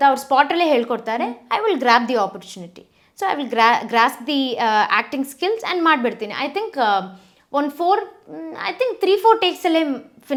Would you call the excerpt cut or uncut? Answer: uncut